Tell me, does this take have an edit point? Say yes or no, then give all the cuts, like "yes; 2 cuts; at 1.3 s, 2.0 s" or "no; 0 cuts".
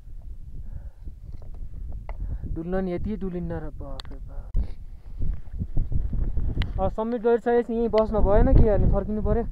no; 0 cuts